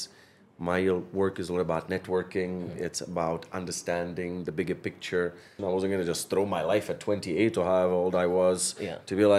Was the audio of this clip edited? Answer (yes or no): yes